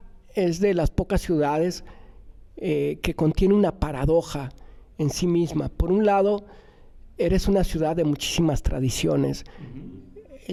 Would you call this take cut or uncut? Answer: uncut